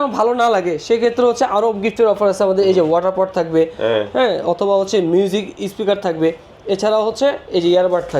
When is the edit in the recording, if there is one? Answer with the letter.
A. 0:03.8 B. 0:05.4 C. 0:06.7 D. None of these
D